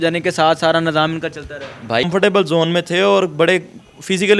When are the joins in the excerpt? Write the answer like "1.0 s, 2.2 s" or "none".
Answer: 2.1 s

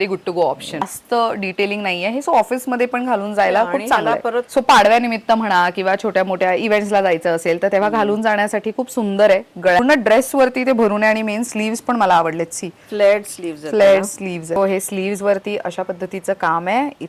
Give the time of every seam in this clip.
1.0 s, 4.5 s, 9.8 s, 14.6 s

